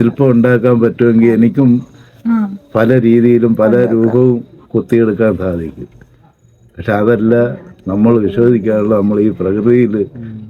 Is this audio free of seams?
yes; 0 cuts

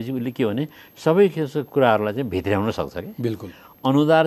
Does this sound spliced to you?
no; 0 cuts

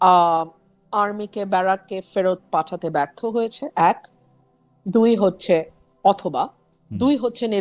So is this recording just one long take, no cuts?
yes; 0 cuts

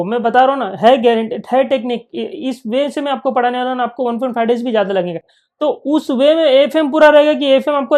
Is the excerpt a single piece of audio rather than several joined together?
no; 1 cut; at 5.3 s

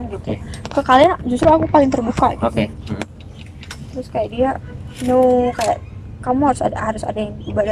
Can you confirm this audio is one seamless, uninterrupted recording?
yes; 0 cuts

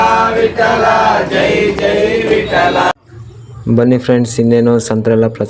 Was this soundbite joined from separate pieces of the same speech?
no; 0 cuts

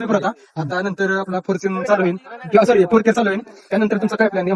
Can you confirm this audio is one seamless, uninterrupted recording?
yes; 0 cuts

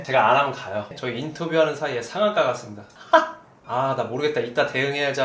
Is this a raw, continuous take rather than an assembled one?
no; 2 cuts; at 0.9 s, 3.6 s

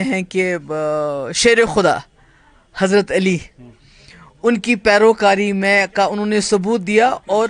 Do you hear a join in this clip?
no; 0 cuts

